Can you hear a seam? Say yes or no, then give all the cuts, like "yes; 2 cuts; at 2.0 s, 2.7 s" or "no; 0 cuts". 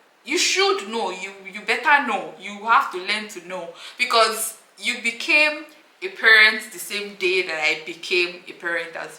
no; 0 cuts